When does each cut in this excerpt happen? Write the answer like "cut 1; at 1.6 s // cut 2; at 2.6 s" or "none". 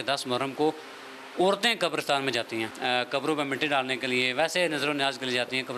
none